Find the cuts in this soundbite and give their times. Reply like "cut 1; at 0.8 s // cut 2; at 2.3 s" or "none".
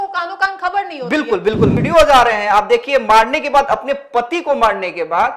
cut 1; at 1.8 s